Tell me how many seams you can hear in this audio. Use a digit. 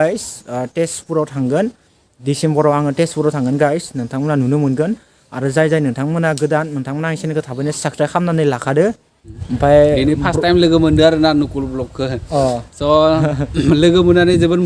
1